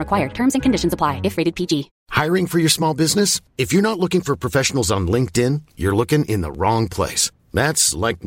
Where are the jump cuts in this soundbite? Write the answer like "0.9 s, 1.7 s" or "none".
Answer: 2.0 s